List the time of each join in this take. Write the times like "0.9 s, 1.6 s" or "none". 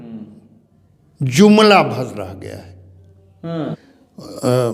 3.8 s

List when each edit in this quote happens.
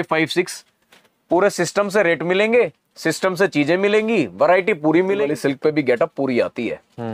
5.3 s

